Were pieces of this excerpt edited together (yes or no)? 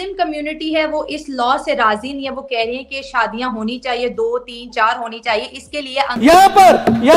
yes